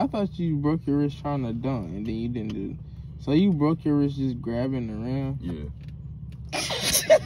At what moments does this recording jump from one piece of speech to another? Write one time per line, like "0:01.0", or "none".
none